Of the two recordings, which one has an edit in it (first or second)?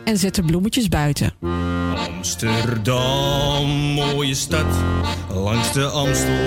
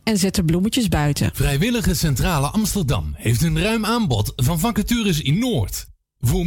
second